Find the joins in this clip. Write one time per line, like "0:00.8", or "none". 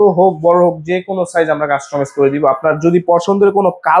none

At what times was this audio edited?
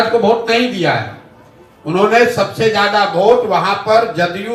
none

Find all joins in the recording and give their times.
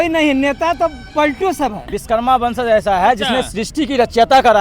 0:02.0

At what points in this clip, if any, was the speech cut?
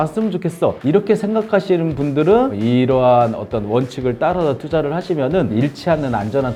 none

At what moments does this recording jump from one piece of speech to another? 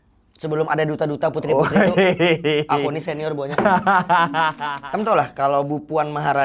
0:04.7

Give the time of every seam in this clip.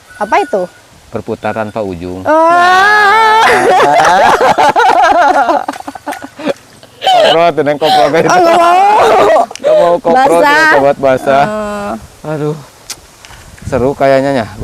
none

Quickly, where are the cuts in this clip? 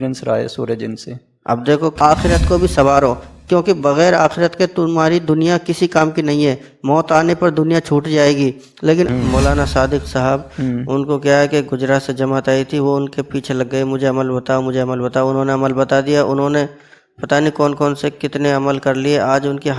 0:02.0
0:09.1

